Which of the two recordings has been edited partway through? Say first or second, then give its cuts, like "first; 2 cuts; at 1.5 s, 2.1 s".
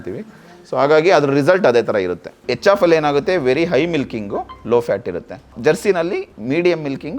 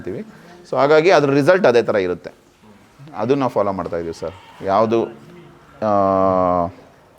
first; 3 cuts; at 2.4 s, 5.5 s, 6.3 s